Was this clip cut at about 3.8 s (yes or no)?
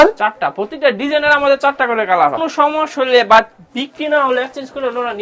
no